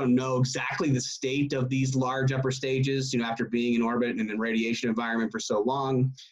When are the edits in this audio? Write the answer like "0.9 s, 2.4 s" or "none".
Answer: none